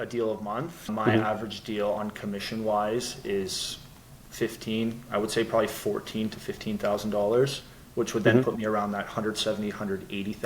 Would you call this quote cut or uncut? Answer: cut